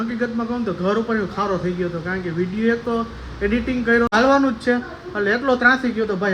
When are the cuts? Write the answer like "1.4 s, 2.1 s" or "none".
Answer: 4.1 s